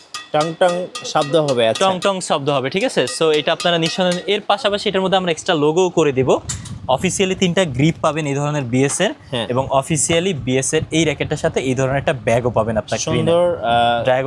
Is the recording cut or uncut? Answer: uncut